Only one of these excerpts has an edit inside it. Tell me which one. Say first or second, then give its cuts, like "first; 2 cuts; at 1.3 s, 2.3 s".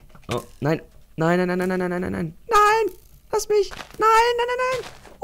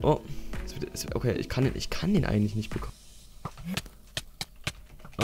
second; 1 cut; at 2.8 s